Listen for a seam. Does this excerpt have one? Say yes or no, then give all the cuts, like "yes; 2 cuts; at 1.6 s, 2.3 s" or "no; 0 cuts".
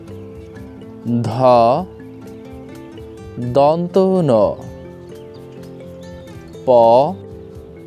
yes; 2 cuts; at 5.1 s, 6.6 s